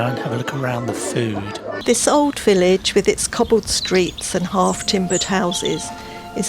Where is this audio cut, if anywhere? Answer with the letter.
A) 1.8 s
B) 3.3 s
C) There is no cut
A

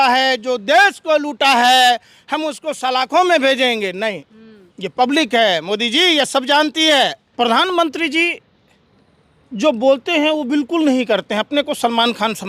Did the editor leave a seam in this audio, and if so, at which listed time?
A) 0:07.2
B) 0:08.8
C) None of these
A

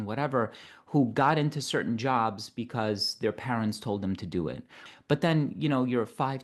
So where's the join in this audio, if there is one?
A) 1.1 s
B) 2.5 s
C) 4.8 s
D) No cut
C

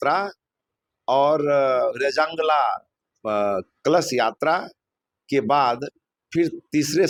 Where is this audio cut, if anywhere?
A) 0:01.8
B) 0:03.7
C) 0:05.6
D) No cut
D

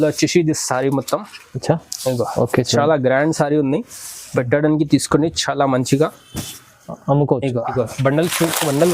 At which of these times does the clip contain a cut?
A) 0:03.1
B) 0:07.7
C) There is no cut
B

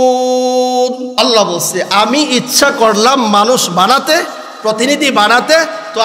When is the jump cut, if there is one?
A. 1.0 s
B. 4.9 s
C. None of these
A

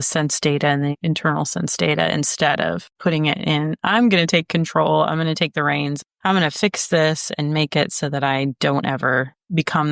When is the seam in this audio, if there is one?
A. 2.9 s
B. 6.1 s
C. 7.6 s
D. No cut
D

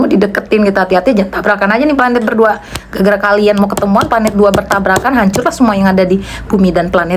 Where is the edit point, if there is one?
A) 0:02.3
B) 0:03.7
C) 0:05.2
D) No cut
D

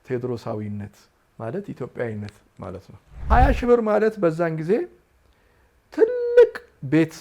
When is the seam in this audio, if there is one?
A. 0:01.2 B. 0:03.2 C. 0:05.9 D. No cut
B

